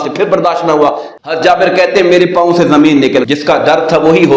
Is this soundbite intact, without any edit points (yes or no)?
no